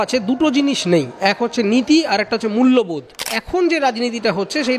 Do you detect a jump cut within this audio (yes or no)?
yes